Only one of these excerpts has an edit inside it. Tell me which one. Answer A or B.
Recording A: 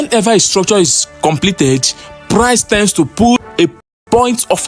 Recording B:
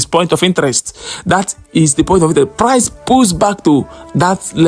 A